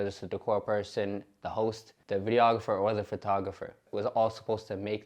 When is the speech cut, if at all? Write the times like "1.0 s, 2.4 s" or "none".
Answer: 1.9 s, 3.8 s